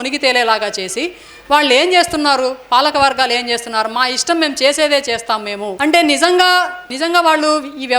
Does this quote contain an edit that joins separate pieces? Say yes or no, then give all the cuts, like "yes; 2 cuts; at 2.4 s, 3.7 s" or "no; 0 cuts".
yes; 2 cuts; at 5.7 s, 6.9 s